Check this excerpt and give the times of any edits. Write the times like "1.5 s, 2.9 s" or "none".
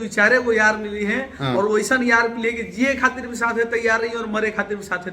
none